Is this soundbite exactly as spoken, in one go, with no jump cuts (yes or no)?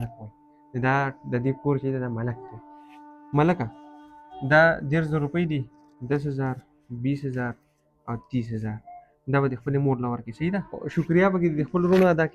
no